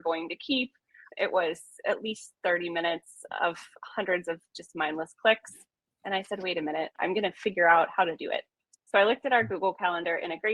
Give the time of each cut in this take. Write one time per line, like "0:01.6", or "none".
0:06.9